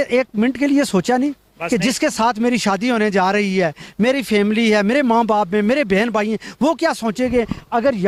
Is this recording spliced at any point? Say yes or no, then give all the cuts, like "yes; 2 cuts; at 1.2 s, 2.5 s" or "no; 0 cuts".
no; 0 cuts